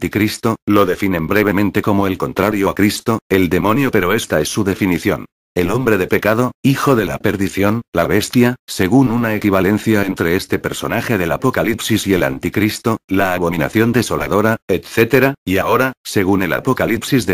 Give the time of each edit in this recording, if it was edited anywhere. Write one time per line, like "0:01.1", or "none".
0:14.2